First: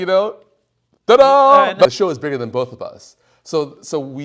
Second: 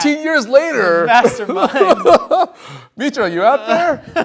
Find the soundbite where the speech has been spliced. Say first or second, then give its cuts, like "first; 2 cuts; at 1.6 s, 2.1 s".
first; 1 cut; at 1.9 s